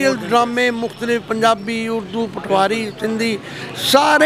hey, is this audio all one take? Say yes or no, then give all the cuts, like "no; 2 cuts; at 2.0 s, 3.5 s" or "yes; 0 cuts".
yes; 0 cuts